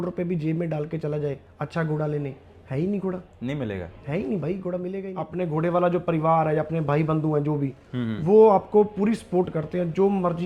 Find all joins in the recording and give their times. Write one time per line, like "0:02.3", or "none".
0:05.2